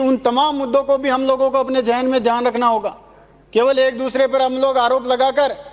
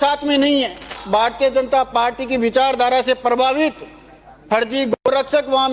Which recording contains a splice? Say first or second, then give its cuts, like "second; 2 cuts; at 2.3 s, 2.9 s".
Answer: second; 1 cut; at 0.9 s